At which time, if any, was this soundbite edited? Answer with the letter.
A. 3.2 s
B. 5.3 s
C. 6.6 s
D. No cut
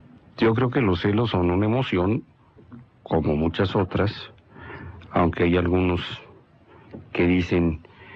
D